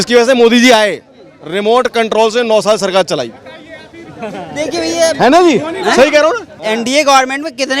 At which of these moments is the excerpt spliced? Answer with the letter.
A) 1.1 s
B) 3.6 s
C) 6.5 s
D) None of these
C